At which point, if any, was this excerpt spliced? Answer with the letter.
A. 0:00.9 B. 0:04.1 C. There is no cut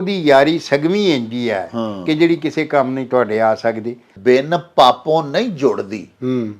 B